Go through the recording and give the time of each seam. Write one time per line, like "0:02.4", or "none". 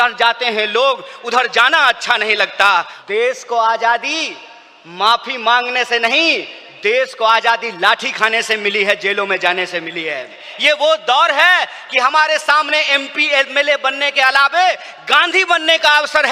0:02.9
0:10.5

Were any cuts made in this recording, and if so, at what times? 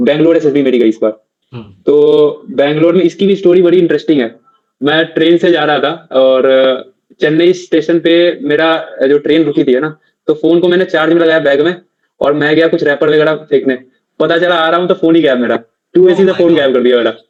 none

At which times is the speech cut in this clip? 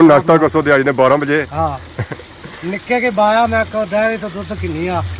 none

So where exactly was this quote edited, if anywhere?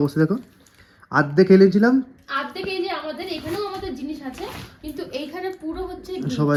none

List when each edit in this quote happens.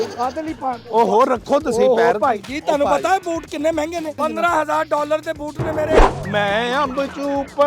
0:04.2
0:06.0

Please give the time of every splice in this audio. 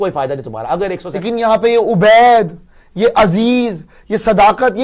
0:01.1

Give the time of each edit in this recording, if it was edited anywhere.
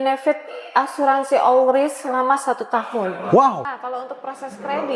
0:03.7

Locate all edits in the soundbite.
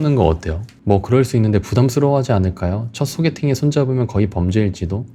none

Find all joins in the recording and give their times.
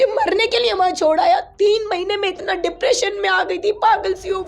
none

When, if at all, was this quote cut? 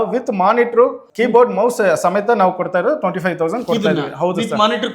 0:01.0

